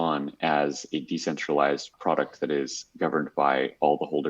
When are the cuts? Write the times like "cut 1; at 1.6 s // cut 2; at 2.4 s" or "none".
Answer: cut 1; at 1.9 s